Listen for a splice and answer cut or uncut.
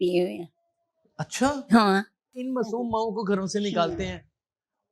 cut